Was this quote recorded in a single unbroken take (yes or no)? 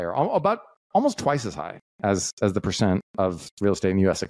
yes